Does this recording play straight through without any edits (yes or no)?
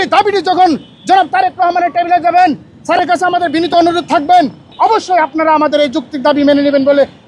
no